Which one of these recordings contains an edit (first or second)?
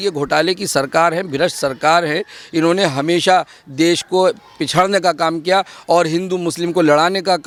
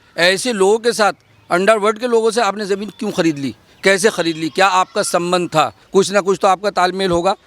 second